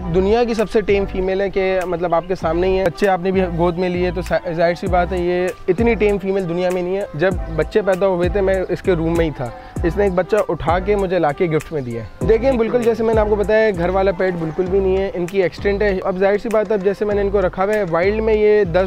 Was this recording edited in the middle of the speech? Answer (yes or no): yes